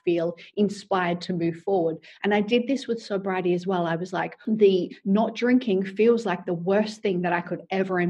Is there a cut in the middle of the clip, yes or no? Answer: yes